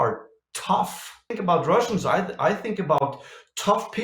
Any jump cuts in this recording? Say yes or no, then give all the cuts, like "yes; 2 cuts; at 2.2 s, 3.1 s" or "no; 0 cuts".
yes; 1 cut; at 1.3 s